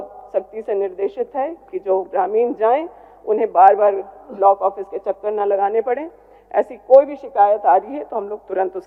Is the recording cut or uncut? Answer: uncut